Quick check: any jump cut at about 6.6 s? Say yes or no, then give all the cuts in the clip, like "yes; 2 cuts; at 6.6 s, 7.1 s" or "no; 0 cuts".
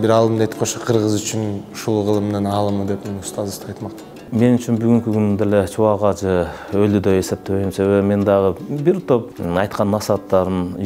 no; 2 cuts; at 4.3 s, 9.3 s